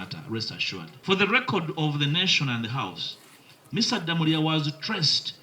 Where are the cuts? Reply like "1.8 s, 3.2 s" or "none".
0.9 s